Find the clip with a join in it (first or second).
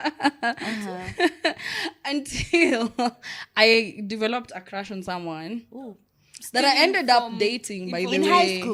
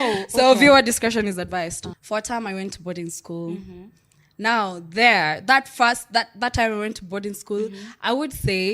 second